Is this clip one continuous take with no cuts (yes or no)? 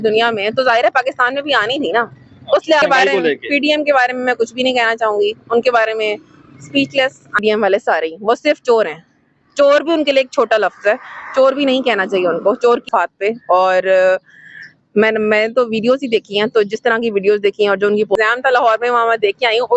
no